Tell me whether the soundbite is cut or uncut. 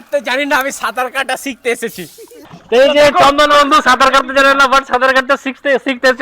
cut